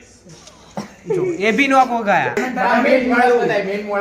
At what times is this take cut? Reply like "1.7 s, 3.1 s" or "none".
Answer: 2.4 s